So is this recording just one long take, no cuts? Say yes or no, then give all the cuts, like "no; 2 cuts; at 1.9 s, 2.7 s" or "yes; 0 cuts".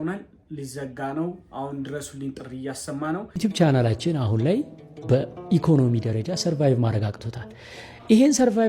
no; 1 cut; at 3.3 s